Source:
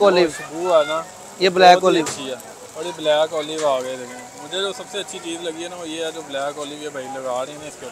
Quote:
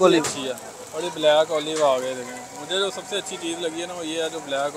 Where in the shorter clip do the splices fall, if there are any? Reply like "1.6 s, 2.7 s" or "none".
none